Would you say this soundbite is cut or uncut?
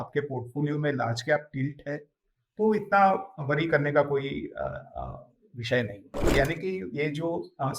cut